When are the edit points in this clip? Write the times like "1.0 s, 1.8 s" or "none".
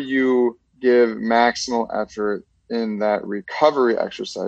none